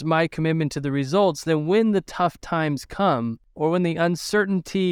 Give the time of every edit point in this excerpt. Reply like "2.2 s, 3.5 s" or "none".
3.4 s

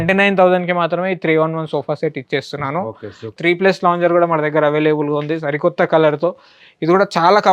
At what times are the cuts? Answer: 3.3 s

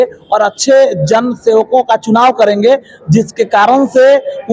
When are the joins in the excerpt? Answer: none

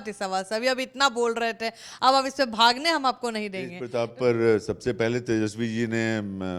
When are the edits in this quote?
3.8 s

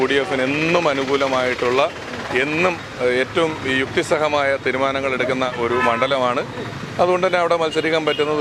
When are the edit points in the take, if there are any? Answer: none

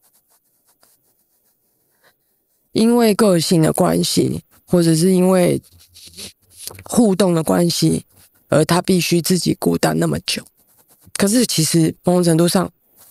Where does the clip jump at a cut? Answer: 3.2 s, 11.1 s

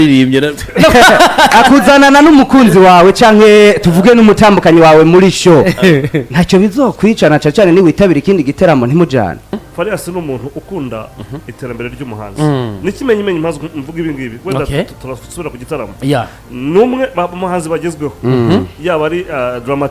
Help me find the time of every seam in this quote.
9.5 s

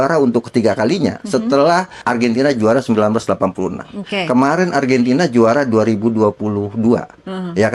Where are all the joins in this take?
2.0 s

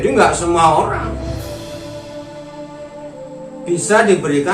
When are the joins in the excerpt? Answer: 1.0 s, 3.4 s

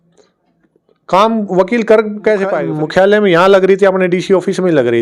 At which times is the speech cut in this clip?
2.6 s

